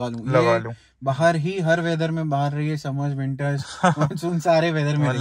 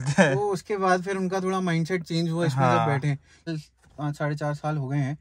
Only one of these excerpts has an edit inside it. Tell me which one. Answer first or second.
second